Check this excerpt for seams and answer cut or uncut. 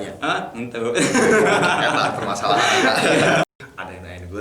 cut